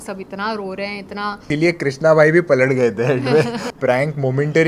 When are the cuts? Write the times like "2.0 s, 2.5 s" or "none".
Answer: 1.5 s, 3.6 s